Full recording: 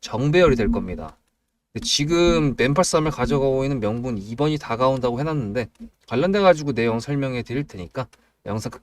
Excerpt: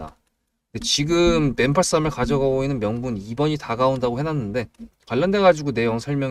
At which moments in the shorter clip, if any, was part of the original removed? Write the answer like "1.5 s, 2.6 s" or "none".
none